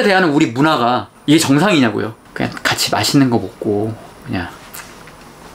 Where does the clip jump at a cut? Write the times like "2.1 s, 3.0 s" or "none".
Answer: 2.1 s